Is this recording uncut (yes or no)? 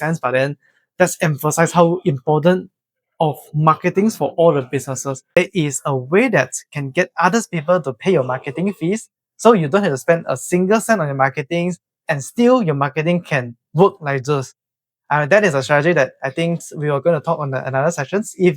no